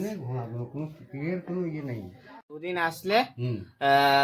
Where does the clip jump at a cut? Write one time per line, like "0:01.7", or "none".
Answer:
0:02.4